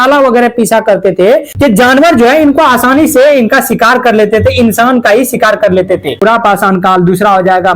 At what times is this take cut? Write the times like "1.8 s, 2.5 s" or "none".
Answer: 1.5 s, 6.2 s